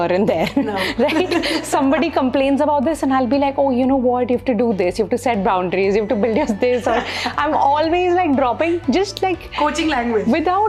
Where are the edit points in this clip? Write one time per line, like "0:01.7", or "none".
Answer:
none